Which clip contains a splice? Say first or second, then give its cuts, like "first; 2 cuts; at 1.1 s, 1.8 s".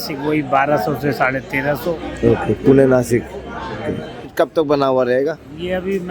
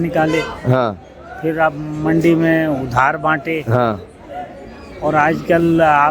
first; 1 cut; at 4.3 s